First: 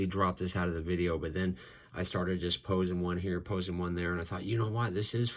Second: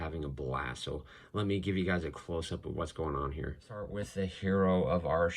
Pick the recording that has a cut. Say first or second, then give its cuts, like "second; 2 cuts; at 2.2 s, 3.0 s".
second; 1 cut; at 4.0 s